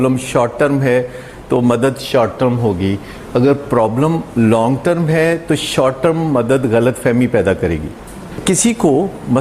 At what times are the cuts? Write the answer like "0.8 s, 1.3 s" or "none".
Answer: 8.4 s